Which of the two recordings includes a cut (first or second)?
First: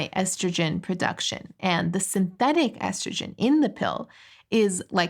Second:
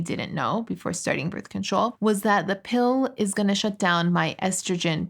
second